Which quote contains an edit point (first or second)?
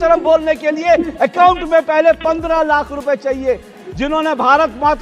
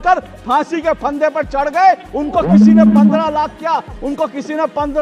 first